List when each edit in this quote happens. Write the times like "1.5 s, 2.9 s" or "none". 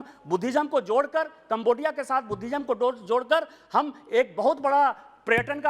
none